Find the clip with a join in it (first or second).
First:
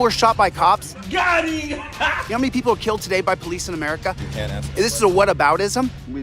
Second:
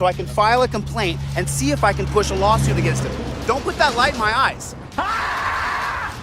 first